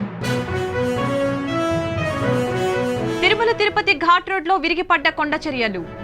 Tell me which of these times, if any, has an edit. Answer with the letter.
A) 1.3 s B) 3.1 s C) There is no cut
B